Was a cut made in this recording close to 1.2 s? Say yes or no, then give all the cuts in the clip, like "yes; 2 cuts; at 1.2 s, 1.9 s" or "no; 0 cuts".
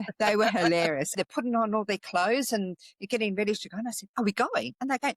yes; 1 cut; at 1.2 s